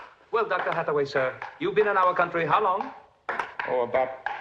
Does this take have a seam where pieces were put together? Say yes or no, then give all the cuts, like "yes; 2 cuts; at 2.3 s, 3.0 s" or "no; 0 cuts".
no; 0 cuts